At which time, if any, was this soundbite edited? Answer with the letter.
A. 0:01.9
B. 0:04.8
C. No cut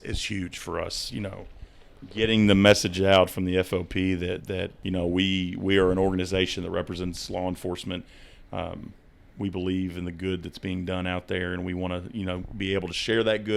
B